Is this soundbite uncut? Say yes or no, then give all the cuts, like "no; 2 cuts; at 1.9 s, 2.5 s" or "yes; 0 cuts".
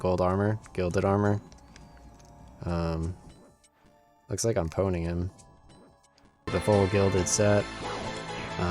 no; 1 cut; at 6.5 s